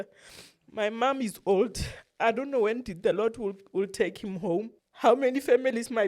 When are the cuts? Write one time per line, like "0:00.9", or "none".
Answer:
0:04.8